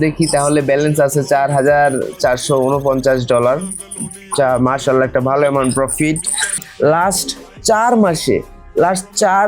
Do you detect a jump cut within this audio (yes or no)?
yes